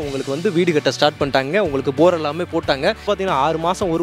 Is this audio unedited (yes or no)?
no